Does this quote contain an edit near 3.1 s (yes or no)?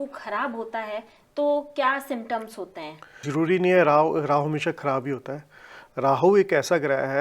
yes